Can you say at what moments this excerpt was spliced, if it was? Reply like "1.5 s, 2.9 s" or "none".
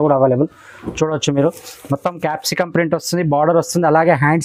none